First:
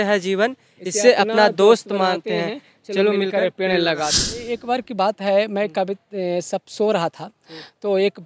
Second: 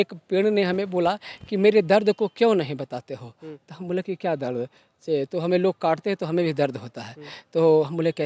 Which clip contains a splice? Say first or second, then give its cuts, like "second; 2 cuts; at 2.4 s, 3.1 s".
first; 1 cut; at 4.5 s